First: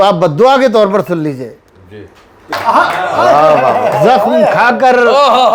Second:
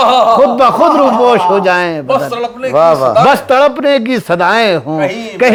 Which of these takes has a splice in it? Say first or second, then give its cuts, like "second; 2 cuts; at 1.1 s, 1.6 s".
first; 1 cut; at 2.6 s